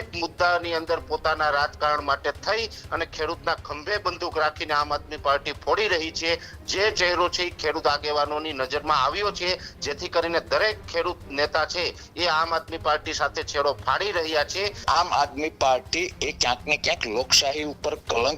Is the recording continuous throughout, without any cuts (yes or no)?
no